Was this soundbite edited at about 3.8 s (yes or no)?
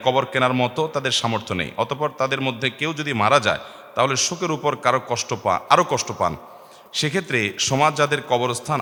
no